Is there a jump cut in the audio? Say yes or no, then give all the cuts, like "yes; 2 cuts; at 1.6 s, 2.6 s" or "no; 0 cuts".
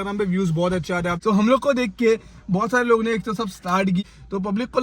yes; 2 cuts; at 1.2 s, 4.0 s